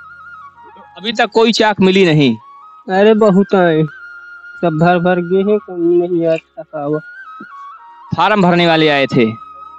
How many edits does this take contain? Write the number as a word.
one